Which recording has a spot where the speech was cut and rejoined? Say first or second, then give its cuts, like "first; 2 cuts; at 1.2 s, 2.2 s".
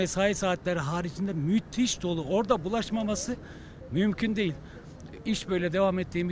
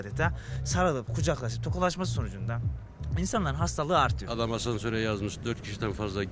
second; 1 cut; at 4.2 s